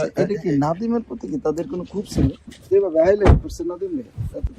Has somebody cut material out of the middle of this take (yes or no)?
yes